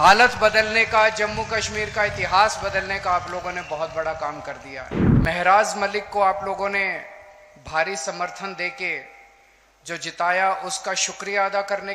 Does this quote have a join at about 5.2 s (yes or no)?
yes